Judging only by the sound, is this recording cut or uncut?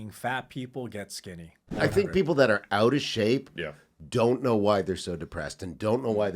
cut